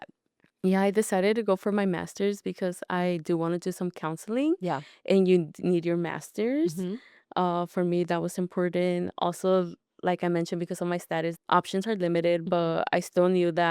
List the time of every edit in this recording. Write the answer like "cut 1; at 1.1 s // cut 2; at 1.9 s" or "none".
cut 1; at 11.4 s